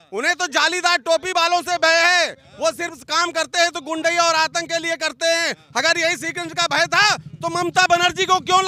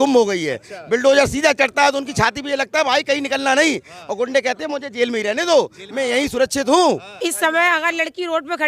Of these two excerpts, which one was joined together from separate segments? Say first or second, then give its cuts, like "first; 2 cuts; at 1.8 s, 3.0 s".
second; 1 cut; at 7.2 s